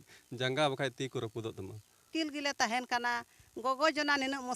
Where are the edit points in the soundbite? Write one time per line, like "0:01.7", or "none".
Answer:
0:02.0